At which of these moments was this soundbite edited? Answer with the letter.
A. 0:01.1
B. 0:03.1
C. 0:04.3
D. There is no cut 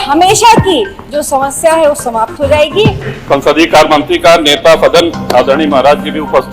B